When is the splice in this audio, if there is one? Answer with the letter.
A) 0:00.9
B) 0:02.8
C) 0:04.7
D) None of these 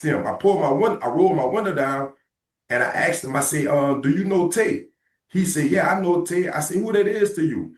C